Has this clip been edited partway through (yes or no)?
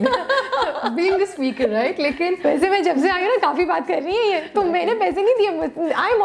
no